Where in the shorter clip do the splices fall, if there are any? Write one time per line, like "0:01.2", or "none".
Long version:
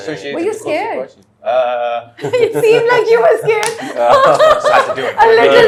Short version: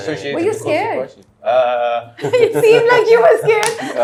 none